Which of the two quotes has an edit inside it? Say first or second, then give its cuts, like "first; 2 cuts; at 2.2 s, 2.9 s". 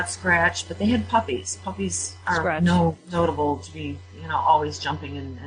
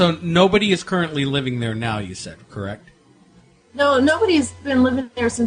first; 1 cut; at 2.6 s